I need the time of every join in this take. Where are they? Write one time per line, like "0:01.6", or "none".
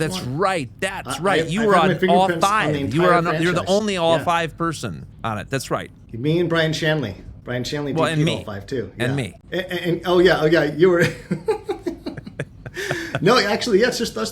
0:05.1
0:07.4
0:09.4